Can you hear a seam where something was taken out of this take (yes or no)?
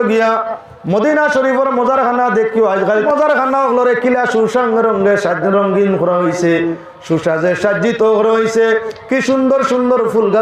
yes